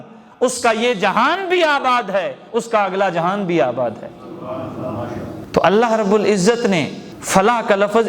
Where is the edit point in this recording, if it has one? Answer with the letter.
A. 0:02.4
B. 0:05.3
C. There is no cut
C